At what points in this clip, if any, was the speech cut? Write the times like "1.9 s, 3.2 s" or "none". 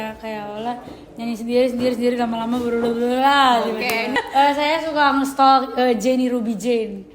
4.1 s